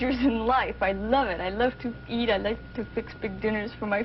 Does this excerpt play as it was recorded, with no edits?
no; 1 cut; at 3.1 s

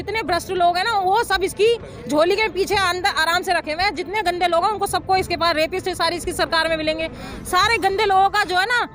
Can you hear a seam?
no; 0 cuts

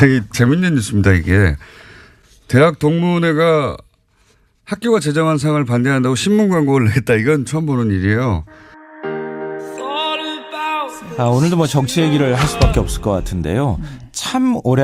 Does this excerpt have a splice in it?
yes; 1 cut; at 8.4 s

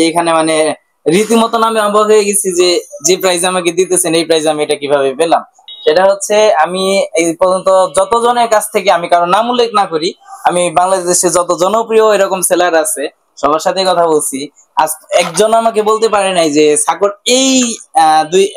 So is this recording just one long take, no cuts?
no; 1 cut; at 5.6 s

